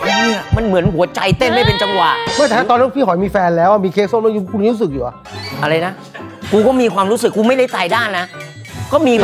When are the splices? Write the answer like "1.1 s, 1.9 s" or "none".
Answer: none